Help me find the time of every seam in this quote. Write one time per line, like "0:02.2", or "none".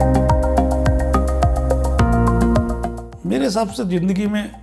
0:02.9